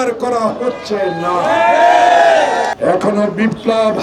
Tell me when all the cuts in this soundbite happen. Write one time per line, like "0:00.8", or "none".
0:02.7